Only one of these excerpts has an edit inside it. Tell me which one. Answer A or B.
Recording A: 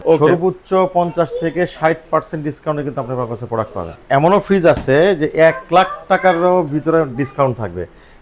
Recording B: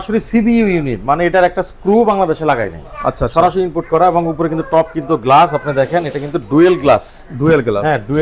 A